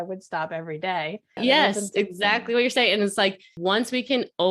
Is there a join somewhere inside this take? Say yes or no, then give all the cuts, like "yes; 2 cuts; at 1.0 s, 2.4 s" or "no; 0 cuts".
yes; 2 cuts; at 1.4 s, 3.5 s